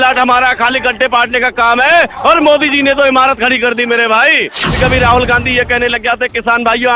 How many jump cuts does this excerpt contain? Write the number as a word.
one